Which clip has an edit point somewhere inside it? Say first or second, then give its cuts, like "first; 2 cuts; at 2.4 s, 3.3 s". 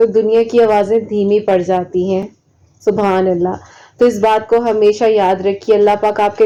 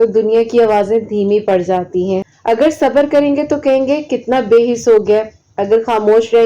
second; 1 cut; at 2.3 s